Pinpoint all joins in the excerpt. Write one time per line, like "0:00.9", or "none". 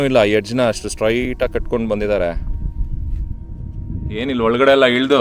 0:04.2